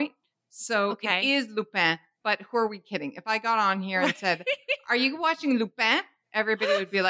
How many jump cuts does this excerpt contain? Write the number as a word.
zero